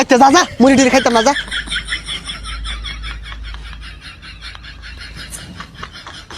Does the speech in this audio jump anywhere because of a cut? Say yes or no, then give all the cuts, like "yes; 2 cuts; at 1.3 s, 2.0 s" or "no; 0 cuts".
yes; 1 cut; at 1.4 s